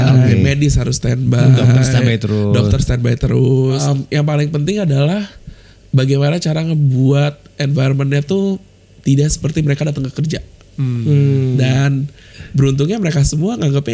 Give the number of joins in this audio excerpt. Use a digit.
2